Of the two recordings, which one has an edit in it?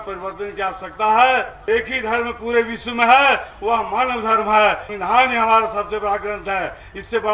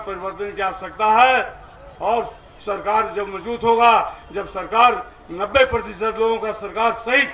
first; 2 cuts; at 1.5 s, 4.9 s

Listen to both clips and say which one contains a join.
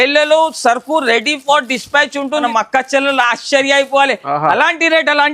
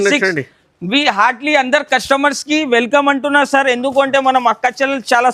first; 1 cut; at 2.4 s

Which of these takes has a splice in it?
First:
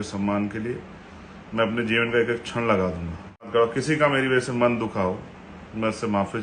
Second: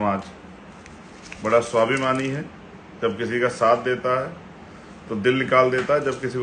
first; 1 cut; at 3.4 s

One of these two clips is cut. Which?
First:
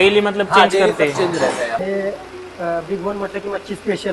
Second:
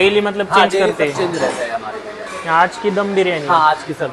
first; 1 cut; at 1.8 s

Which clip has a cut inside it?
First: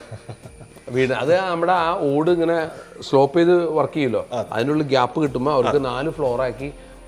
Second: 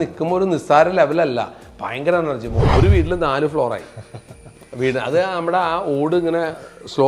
second; 1 cut; at 2.5 s

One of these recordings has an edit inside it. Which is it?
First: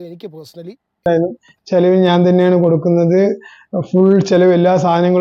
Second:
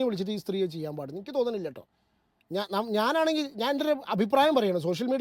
first; 1 cut; at 1.1 s

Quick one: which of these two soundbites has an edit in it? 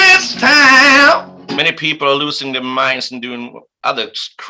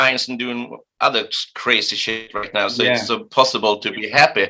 first; 1 cut; at 1.6 s

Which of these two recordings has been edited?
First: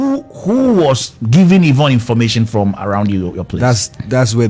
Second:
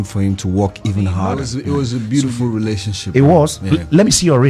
second; 1 cut; at 1.5 s

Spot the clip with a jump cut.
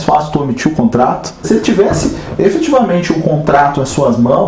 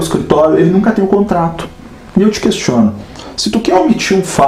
first; 1 cut; at 1.5 s

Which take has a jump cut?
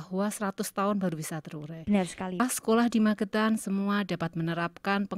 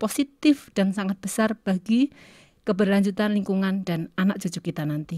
first; 1 cut; at 2.4 s

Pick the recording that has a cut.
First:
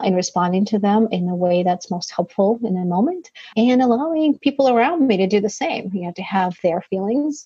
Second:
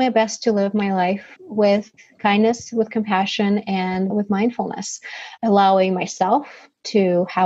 second; 2 cuts; at 1.3 s, 4.1 s

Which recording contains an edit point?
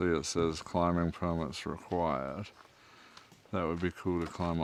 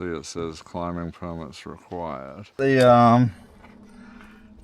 second; 1 cut; at 2.6 s

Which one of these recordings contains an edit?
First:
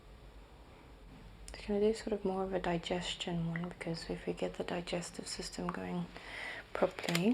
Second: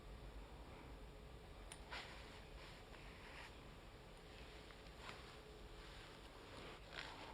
first; 1 cut; at 1.1 s

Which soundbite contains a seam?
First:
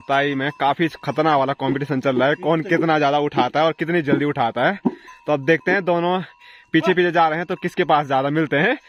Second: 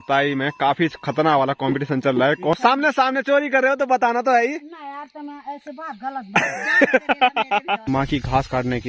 second; 2 cuts; at 2.6 s, 7.8 s

